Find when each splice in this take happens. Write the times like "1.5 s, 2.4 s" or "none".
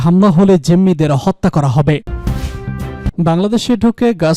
2.1 s